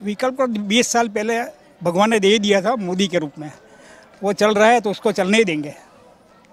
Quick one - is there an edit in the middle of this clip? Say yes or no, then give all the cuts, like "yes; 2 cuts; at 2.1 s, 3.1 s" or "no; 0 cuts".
no; 0 cuts